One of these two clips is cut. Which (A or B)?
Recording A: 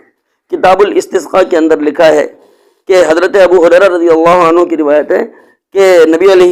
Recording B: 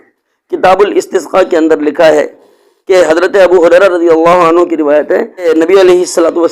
B